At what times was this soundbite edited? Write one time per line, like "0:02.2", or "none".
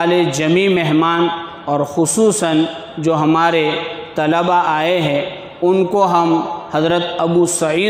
none